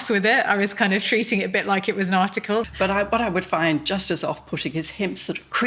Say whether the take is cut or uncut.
cut